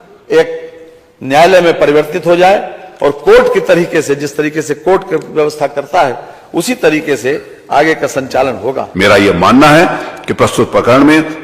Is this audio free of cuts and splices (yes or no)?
no